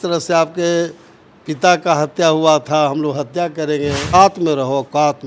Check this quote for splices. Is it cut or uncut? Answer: cut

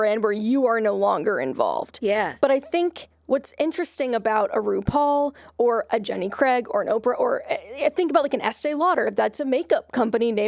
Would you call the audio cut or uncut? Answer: uncut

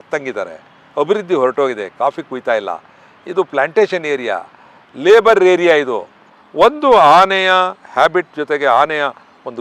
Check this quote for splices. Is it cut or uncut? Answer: cut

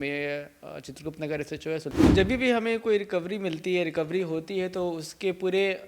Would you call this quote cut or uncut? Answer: cut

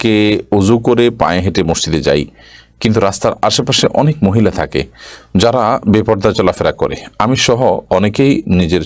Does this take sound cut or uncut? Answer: uncut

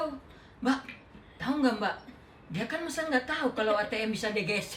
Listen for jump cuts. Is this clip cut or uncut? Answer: uncut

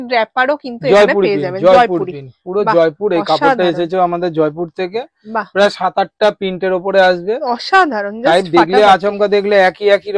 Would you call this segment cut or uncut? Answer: uncut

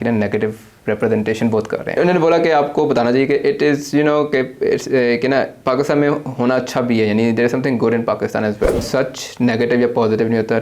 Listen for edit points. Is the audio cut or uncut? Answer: cut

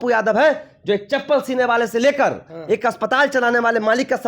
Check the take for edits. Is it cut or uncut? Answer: uncut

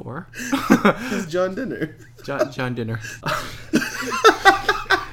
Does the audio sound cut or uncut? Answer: cut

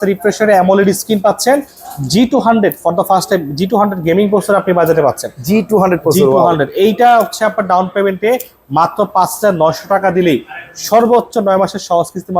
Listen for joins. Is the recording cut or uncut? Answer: uncut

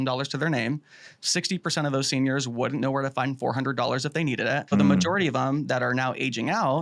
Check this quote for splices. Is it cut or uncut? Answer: cut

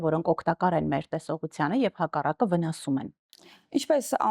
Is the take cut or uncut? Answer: uncut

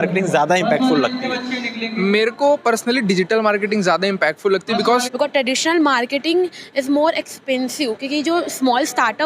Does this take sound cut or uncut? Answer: cut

